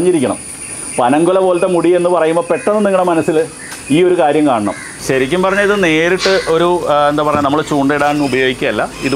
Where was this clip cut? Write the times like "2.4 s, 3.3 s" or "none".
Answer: 4.9 s

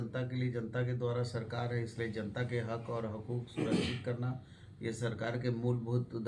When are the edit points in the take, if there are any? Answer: none

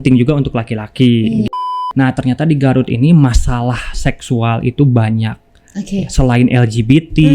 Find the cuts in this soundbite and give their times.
1.8 s

